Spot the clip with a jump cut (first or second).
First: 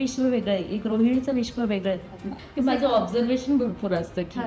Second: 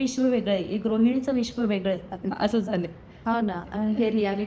first